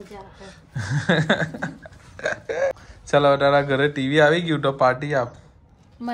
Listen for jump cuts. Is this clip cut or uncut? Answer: cut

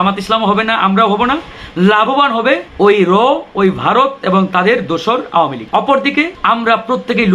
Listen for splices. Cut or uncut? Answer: cut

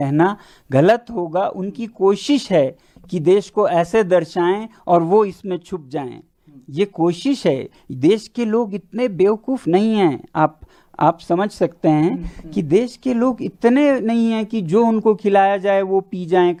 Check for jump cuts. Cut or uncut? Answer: uncut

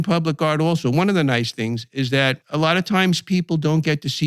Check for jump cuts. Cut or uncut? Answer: cut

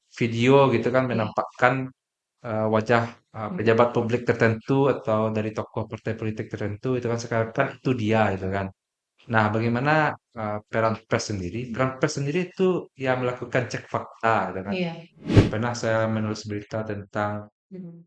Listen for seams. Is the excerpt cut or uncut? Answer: cut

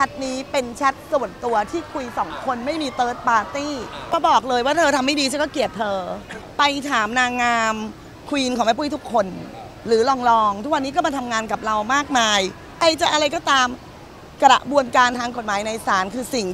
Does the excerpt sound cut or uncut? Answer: cut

